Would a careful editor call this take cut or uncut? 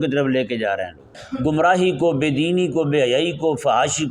cut